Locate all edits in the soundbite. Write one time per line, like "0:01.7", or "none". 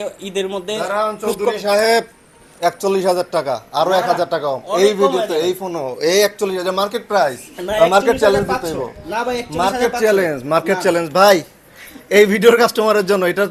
none